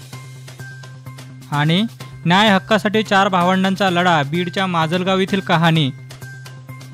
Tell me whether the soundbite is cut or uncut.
cut